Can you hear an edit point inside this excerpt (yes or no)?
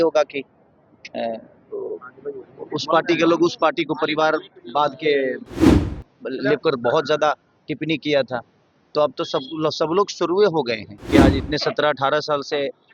yes